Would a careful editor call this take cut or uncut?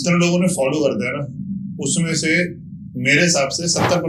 uncut